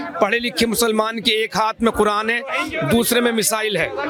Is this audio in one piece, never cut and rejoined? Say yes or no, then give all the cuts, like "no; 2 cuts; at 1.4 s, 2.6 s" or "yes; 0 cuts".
yes; 0 cuts